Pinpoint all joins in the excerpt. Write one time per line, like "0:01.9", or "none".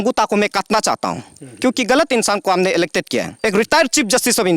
0:03.4